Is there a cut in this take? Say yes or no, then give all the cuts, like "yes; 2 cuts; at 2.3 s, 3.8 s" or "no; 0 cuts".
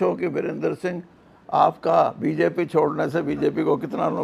no; 0 cuts